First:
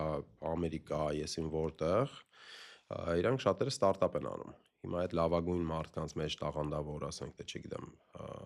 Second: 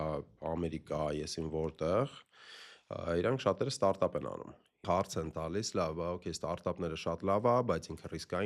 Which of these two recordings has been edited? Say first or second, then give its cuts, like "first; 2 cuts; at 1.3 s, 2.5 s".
second; 1 cut; at 4.8 s